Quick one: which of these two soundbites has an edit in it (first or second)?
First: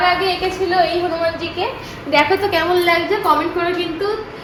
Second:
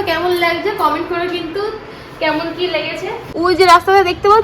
second